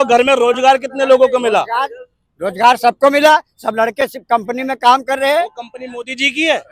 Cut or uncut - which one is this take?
uncut